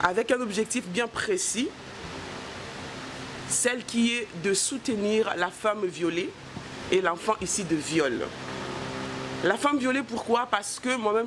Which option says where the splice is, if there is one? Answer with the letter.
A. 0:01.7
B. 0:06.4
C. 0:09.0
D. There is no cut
D